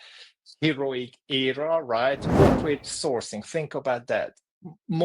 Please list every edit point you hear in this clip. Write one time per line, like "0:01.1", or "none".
0:02.2